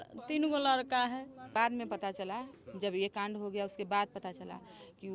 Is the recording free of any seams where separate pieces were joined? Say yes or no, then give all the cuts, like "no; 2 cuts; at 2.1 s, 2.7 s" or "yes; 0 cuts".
no; 1 cut; at 1.5 s